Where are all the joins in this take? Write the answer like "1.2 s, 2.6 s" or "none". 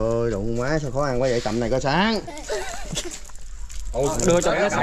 3.2 s